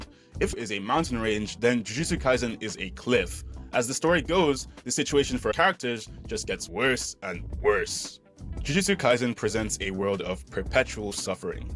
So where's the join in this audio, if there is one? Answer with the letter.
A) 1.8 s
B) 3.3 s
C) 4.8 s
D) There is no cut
D